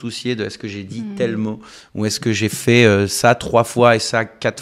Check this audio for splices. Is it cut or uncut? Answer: uncut